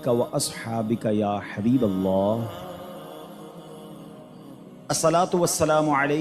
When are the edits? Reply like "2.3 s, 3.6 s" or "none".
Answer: 3.1 s, 4.9 s